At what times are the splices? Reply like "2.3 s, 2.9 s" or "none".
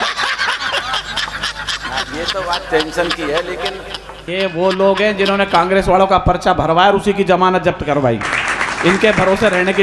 4.2 s